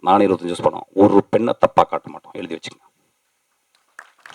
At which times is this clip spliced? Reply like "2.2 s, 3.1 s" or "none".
none